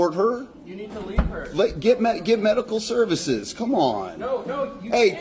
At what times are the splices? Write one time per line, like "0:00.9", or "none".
none